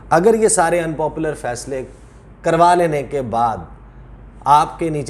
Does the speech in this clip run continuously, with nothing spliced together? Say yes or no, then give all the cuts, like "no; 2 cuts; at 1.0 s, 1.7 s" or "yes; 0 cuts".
yes; 0 cuts